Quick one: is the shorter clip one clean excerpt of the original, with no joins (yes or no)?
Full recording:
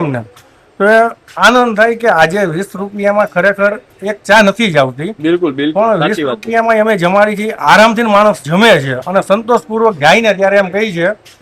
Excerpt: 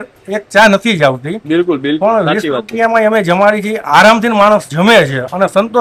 yes